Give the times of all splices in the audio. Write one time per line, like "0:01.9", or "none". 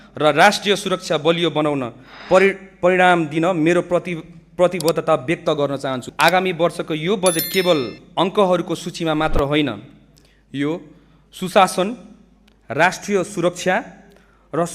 0:06.0